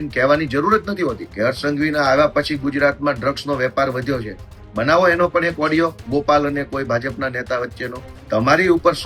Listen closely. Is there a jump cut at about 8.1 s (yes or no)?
yes